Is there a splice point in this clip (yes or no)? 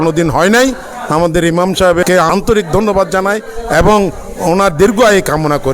yes